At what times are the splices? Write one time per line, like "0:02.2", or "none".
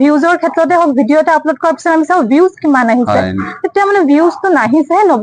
none